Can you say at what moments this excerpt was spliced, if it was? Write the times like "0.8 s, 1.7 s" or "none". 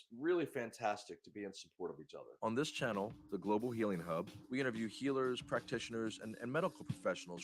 2.2 s